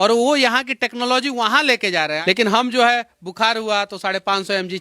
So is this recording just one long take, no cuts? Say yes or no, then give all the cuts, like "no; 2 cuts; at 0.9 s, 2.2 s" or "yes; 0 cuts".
no; 1 cut; at 2.2 s